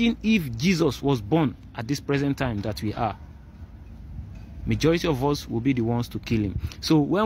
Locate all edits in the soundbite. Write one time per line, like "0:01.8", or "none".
none